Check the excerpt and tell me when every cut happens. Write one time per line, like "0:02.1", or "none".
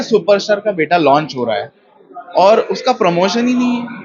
none